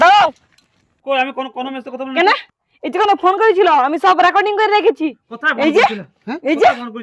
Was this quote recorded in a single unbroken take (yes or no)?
no